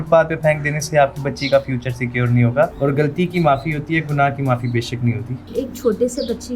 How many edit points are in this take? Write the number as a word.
two